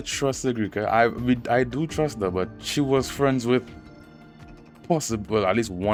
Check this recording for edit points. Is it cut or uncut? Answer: uncut